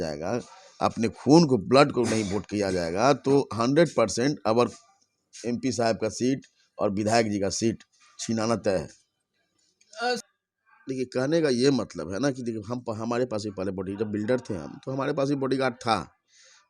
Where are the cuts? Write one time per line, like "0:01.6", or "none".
0:10.2